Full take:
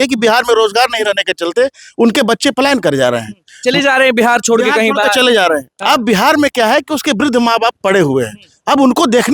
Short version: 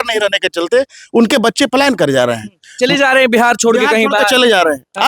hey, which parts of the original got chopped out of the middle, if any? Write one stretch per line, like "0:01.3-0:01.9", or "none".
none